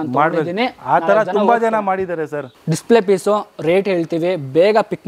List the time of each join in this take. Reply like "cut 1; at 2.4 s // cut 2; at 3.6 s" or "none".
cut 1; at 2.5 s